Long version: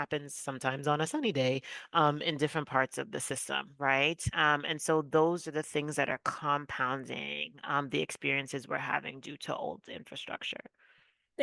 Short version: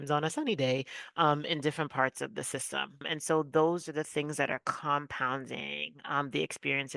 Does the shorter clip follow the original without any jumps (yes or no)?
no